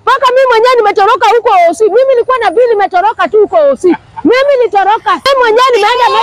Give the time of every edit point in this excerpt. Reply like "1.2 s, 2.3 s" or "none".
5.2 s